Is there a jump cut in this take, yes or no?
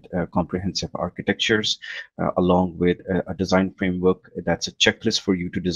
no